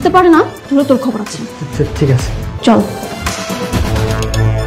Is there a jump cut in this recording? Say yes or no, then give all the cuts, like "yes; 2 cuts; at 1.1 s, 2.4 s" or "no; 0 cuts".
yes; 2 cuts; at 2.4 s, 3.9 s